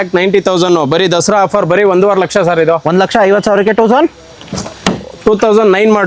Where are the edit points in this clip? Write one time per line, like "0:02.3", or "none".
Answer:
none